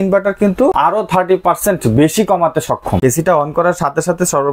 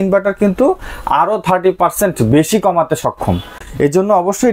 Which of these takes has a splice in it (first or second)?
first